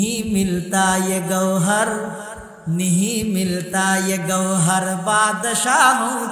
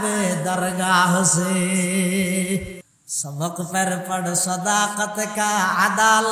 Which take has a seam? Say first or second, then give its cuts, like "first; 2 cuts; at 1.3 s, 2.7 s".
second; 1 cut; at 2.8 s